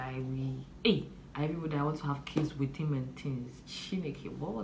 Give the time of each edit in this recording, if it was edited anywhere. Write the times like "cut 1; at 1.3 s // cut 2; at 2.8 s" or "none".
none